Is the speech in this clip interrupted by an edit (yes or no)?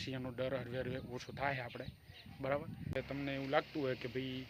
yes